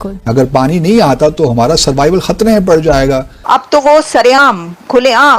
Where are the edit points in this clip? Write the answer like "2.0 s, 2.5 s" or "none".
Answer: 3.3 s